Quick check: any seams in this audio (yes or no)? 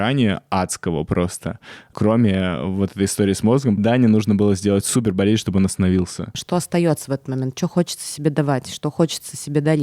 yes